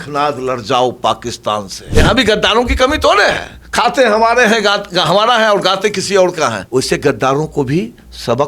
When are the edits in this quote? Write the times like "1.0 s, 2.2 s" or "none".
1.8 s, 6.6 s